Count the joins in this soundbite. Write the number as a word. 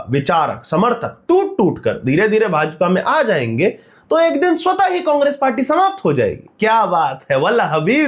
zero